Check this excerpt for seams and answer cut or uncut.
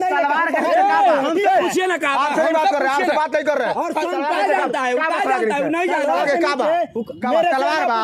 uncut